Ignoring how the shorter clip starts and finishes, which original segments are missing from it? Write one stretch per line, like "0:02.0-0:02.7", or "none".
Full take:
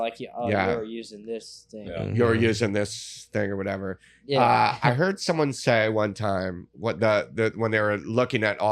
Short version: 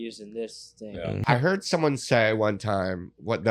0:02.1-0:04.8